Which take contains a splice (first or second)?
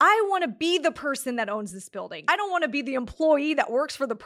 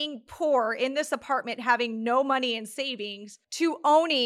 first